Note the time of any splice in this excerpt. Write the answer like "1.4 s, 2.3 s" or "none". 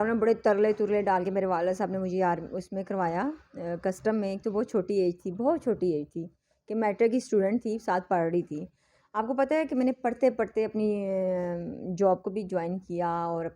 none